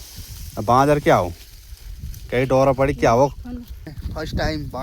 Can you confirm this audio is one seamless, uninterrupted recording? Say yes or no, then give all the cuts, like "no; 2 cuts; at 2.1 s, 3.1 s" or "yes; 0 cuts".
no; 1 cut; at 3.9 s